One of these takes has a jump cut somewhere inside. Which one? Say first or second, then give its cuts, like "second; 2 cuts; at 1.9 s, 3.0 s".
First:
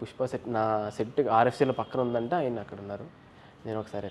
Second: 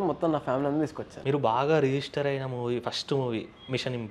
second; 1 cut; at 1.1 s